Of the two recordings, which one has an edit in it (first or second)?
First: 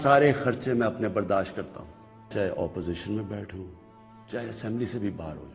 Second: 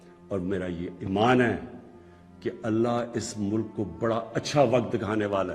first